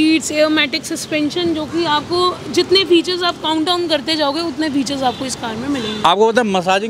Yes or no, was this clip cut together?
no